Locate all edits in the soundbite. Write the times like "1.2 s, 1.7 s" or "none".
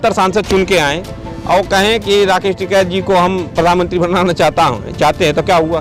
none